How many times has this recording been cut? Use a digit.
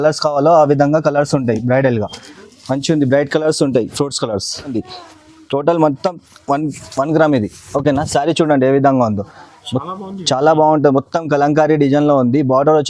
1